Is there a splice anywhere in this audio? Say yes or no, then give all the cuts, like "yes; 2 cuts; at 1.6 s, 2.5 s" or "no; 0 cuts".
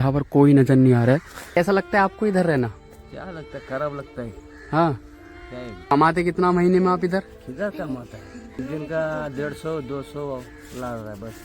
yes; 3 cuts; at 1.6 s, 5.9 s, 8.5 s